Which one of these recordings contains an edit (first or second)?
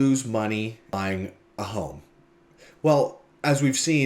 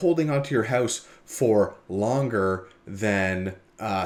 first